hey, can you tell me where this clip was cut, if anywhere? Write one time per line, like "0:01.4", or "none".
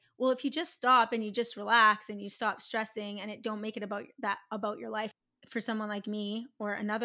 0:05.1